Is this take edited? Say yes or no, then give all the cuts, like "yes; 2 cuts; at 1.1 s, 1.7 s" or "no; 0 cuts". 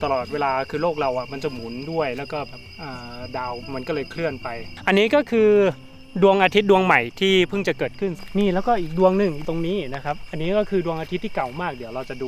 yes; 2 cuts; at 4.7 s, 8.2 s